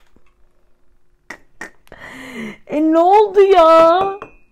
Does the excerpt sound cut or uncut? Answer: uncut